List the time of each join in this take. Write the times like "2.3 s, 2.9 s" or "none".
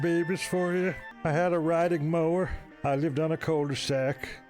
1.1 s, 2.7 s

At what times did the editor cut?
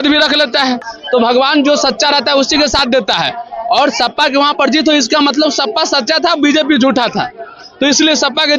0.9 s

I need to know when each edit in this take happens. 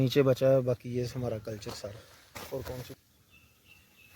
2.9 s

